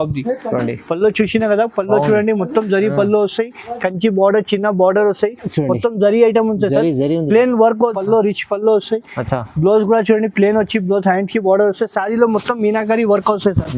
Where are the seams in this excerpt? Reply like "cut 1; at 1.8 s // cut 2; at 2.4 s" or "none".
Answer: cut 1; at 8.0 s